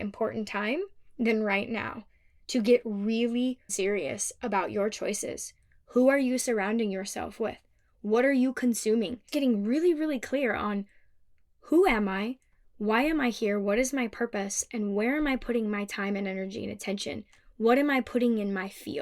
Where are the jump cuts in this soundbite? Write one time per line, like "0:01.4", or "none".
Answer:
0:09.2